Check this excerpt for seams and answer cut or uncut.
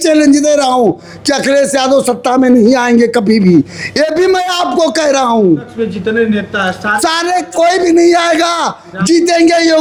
uncut